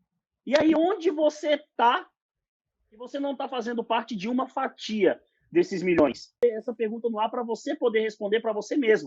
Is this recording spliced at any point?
yes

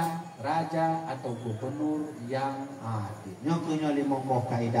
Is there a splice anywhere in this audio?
yes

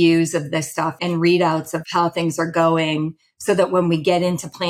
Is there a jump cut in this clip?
yes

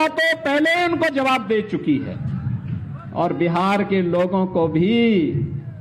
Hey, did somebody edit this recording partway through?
no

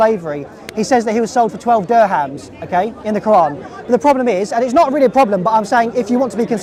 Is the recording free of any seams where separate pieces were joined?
yes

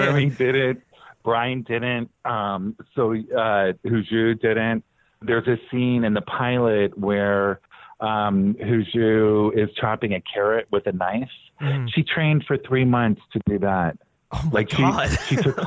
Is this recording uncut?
no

